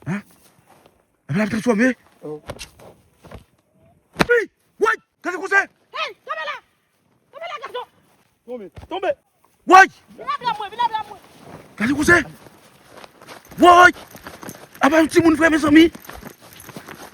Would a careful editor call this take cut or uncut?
cut